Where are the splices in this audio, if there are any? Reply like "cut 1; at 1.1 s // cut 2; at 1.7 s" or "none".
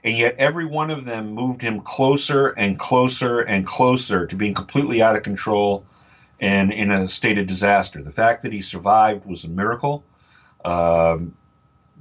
none